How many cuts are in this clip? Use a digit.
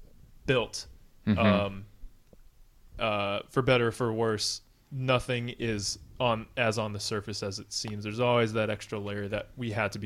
0